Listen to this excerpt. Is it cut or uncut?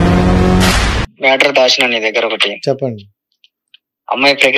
cut